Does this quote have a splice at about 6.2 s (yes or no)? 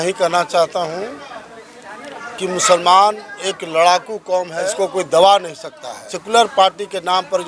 yes